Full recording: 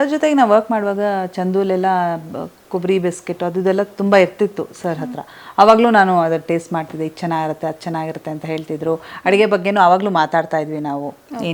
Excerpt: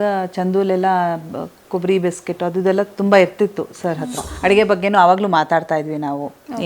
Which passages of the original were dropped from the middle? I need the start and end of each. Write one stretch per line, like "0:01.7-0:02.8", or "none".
0:05.3-0:09.1